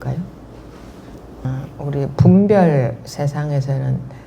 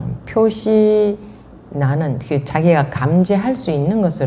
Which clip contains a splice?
first; 1 cut; at 1.5 s

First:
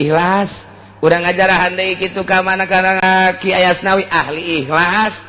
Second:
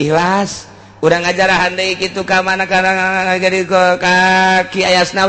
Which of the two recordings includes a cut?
first; 1 cut; at 3.0 s

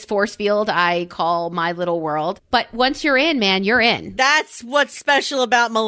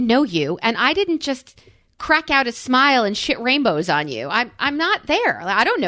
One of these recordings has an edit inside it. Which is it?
first; 2 cuts; at 2.4 s, 4.1 s

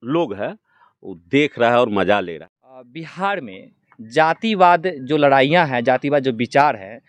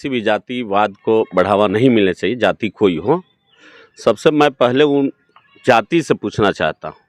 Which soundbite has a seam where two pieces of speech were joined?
first; 1 cut; at 2.3 s

